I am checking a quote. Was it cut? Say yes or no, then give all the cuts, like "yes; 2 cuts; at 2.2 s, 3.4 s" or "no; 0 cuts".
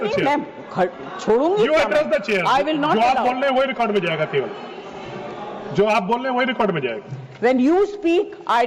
no; 0 cuts